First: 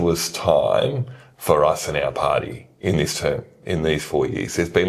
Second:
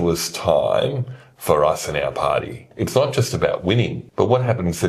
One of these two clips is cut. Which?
second; 2 cuts; at 2.6 s, 4.0 s

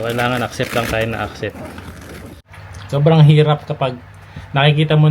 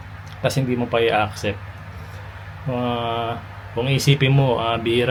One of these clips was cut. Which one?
first; 1 cut; at 2.4 s

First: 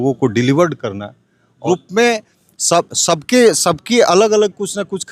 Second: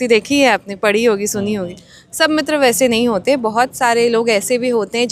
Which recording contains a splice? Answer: first; 1 cut; at 1.6 s

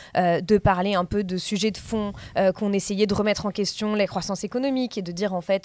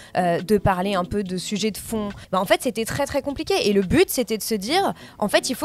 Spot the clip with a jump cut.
second; 1 cut; at 2.2 s

